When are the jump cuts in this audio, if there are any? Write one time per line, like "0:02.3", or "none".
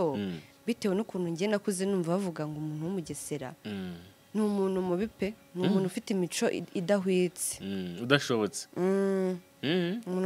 none